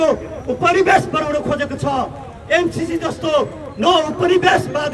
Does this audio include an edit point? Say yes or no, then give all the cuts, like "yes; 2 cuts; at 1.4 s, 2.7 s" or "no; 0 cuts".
no; 0 cuts